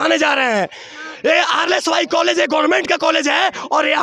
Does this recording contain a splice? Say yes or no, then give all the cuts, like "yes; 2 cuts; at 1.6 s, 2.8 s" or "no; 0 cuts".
no; 0 cuts